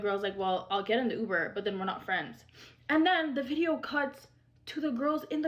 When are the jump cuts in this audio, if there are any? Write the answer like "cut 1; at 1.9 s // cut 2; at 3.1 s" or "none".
cut 1; at 2.8 s